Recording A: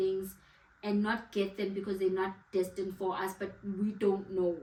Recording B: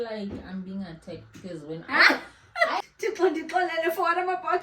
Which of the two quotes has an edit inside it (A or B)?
B